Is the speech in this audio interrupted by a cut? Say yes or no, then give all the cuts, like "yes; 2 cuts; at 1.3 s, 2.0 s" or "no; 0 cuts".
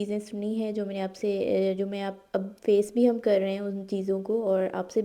no; 0 cuts